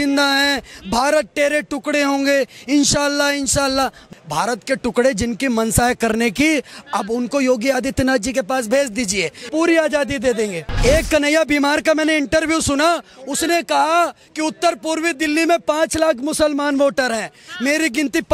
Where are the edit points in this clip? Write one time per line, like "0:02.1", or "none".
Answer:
0:04.1
0:09.4
0:10.7